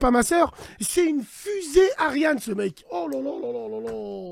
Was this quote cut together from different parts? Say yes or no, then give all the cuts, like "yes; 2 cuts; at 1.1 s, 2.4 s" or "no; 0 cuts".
no; 0 cuts